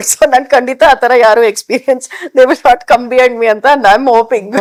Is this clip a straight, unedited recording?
yes; 0 cuts

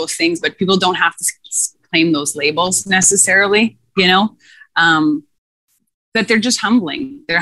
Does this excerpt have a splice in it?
no; 0 cuts

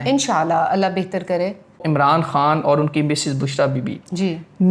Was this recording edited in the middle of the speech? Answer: yes; 1 cut; at 1.8 s

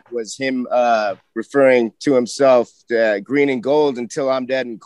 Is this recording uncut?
yes; 0 cuts

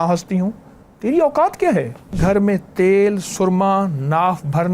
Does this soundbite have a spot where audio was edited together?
yes; 1 cut; at 2.2 s

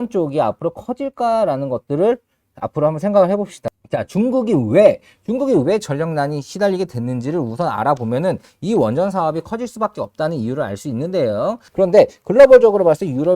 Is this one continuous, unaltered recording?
no; 2 cuts; at 3.7 s, 11.6 s

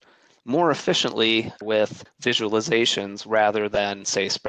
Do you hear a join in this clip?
yes; 1 cut; at 1.6 s

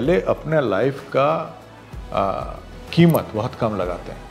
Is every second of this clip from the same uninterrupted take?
yes; 0 cuts

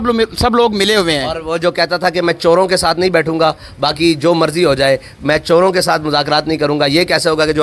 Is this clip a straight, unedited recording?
yes; 0 cuts

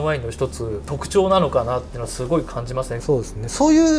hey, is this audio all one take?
no; 2 cuts; at 1.0 s, 3.0 s

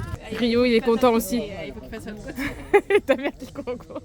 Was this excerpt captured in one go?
yes; 0 cuts

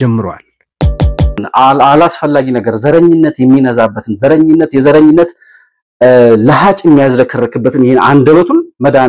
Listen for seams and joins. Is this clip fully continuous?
no; 1 cut; at 1.0 s

